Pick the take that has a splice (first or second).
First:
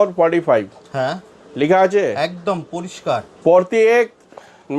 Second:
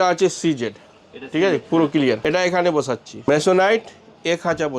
second